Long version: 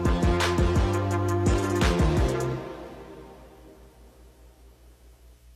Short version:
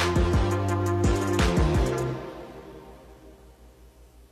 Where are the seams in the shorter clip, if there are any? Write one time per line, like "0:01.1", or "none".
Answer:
none